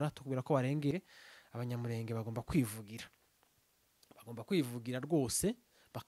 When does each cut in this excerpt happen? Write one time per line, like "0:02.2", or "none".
0:00.9

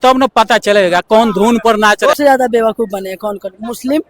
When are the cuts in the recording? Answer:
0:02.2

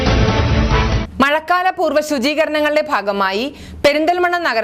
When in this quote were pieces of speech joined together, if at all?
0:01.0

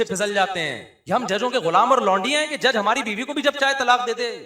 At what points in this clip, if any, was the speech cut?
0:00.9

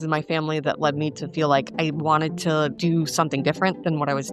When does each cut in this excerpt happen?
0:02.7

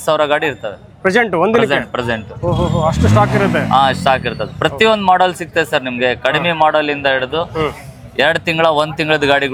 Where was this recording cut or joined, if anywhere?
none

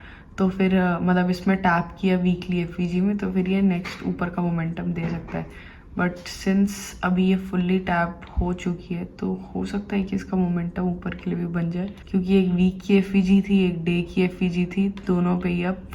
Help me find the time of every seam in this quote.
0:12.0

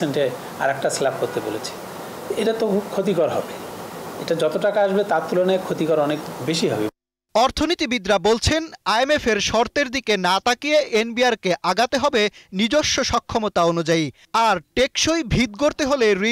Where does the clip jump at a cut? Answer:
none

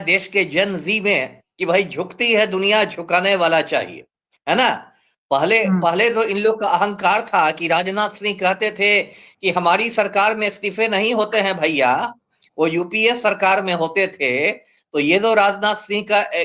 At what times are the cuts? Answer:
none

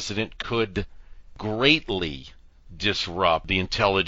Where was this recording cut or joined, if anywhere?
0:01.4

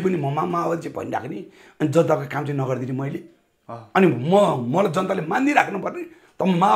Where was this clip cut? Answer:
none

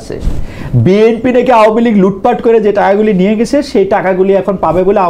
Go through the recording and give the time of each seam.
none

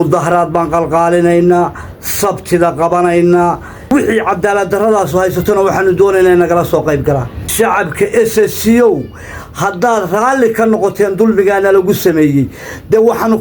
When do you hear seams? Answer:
0:03.8

